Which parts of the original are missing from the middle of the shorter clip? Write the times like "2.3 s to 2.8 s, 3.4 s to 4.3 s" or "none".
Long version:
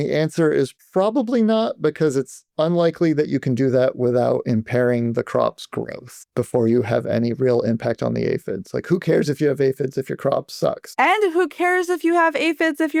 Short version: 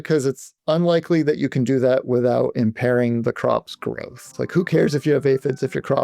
6.2 s to 8.6 s